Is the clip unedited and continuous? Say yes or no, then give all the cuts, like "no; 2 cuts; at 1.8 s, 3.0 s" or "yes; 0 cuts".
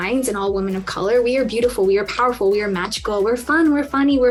yes; 0 cuts